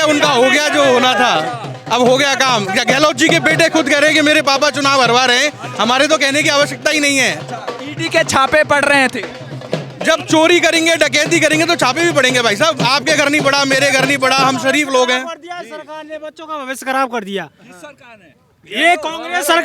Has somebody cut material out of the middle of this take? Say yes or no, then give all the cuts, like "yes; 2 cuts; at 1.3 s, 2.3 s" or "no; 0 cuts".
no; 0 cuts